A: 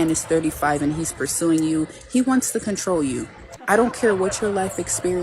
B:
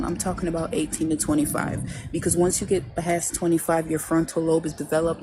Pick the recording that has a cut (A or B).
A